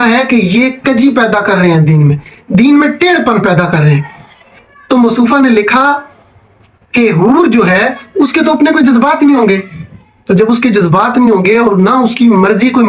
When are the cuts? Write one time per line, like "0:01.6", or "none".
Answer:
none